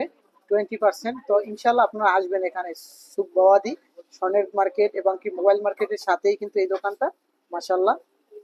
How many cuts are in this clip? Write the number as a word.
zero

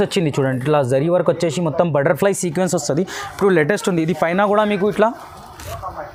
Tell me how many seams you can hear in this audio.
zero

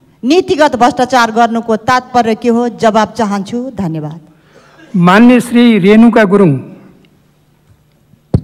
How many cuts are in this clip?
zero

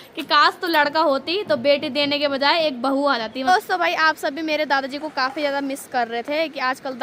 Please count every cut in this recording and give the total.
one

